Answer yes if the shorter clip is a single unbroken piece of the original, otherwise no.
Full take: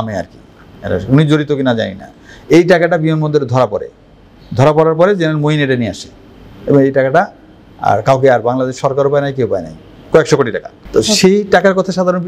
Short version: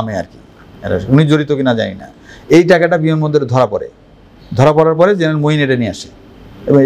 yes